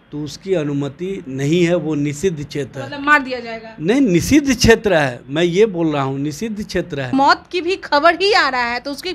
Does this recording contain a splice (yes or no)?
yes